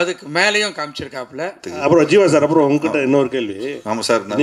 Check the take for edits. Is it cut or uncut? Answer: cut